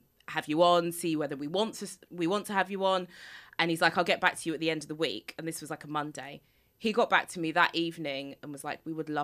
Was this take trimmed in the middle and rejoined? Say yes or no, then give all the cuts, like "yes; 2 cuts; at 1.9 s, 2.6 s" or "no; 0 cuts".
no; 0 cuts